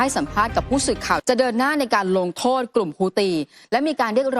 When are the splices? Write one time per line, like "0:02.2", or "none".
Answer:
0:01.2